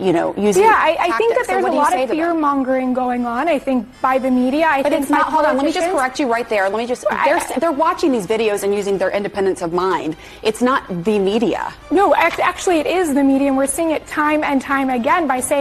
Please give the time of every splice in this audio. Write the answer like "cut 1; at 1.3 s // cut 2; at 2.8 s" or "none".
none